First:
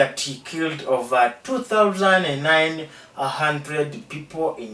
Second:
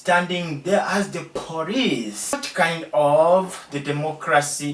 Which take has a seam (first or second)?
second